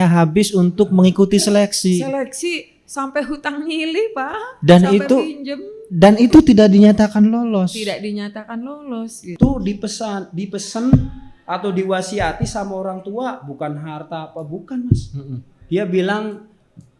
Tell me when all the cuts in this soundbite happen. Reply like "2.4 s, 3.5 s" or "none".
9.3 s